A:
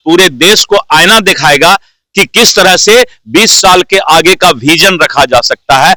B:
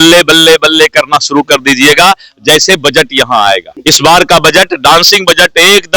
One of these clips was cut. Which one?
B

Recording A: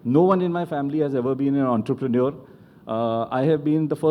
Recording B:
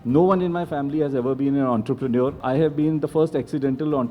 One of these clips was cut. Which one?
B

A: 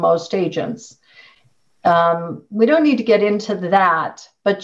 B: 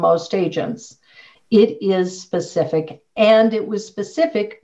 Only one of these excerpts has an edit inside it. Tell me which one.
B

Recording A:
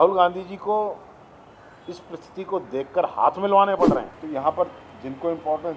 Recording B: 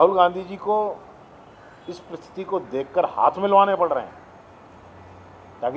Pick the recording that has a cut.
A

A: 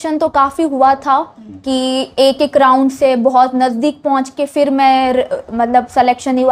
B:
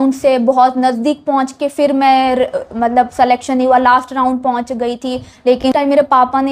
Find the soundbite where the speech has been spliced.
B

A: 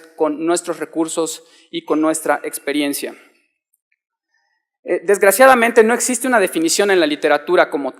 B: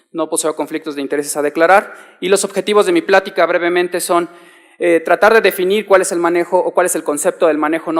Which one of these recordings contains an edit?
A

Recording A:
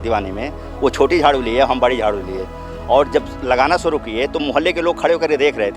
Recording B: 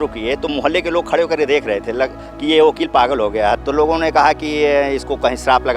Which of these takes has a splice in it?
B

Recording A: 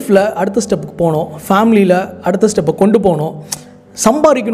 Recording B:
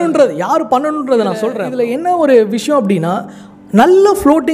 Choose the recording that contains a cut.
B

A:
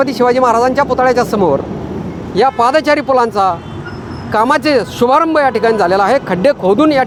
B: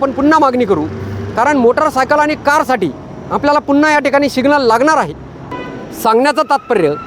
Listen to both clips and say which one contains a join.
B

